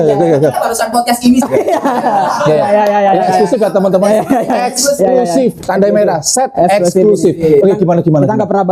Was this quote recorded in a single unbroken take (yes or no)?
yes